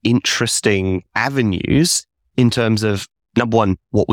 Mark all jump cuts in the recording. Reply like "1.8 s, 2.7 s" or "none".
none